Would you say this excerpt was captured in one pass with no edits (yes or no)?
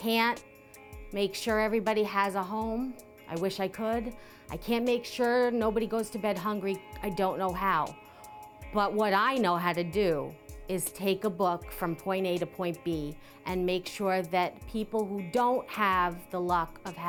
yes